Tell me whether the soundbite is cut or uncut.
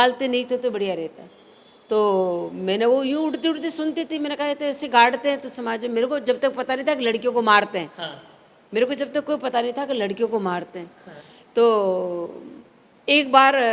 uncut